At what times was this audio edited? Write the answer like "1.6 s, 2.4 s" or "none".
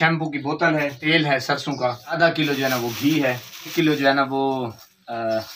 1.0 s, 2.2 s, 3.7 s